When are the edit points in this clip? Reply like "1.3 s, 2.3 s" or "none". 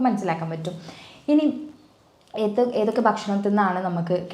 none